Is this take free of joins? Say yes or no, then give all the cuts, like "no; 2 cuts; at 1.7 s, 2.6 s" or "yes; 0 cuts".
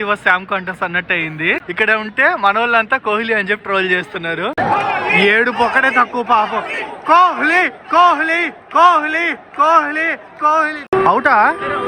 no; 2 cuts; at 1.7 s, 4.5 s